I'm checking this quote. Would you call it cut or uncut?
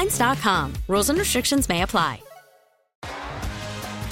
cut